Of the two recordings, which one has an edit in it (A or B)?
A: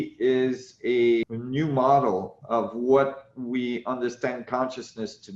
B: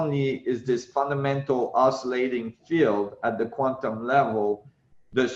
A